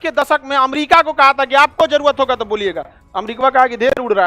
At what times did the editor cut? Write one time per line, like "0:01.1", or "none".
none